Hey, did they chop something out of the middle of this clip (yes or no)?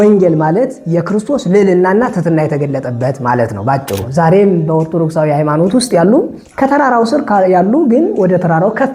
yes